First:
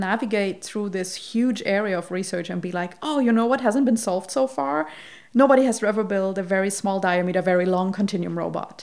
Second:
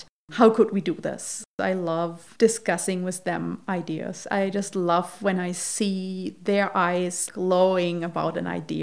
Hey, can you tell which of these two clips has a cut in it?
second; 2 cuts; at 1.7 s, 7.2 s

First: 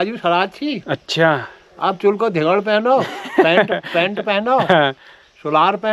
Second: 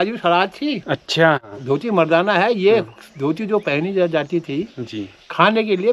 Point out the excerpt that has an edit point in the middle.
second; 1 cut; at 1.5 s

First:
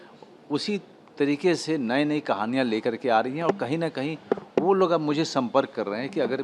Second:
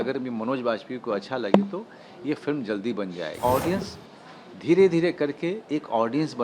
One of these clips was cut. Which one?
second; 1 cut; at 3.3 s

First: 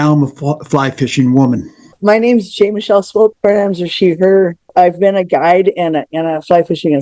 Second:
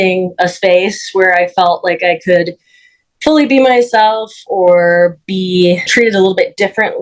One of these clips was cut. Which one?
first; 3 cuts; at 1.9 s, 3.4 s, 4.6 s

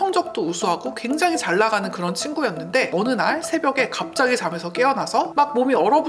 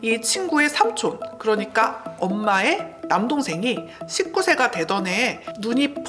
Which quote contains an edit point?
first; 2 cuts; at 2.9 s, 5.3 s

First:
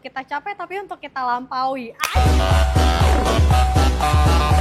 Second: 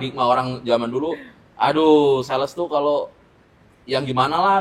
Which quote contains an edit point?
first; 1 cut; at 2.3 s

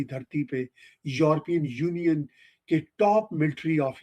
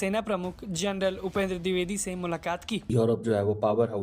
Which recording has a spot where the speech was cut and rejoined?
second; 1 cut; at 2.8 s

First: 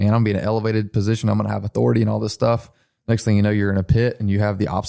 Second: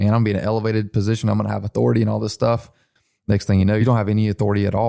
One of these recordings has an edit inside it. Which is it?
second; 2 cuts; at 2.9 s, 3.8 s

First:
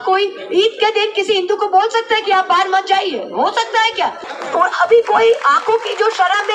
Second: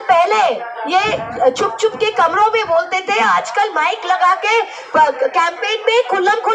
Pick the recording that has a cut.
first; 1 cut; at 4.3 s

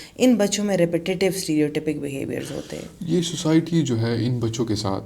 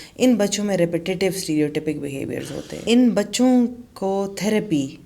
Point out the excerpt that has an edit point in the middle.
second; 1 cut; at 2.8 s

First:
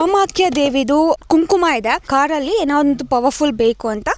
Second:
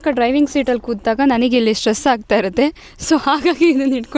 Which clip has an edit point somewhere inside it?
first; 2 cuts; at 1.2 s, 2.0 s

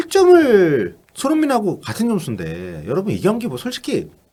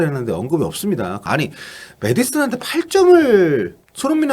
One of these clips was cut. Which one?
second; 1 cut; at 1.2 s

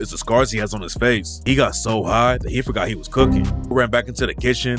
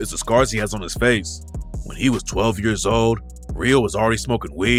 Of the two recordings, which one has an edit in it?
first; 2 cuts; at 1.3 s, 3.7 s

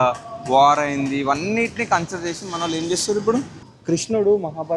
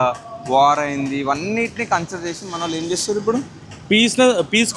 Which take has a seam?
first; 1 cut; at 3.7 s

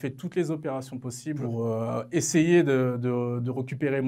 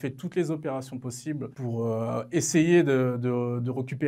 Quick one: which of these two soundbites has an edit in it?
first; 1 cut; at 1.4 s

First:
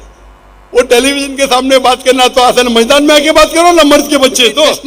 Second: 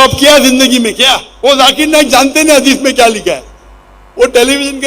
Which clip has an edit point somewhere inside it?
second; 1 cut; at 1.2 s

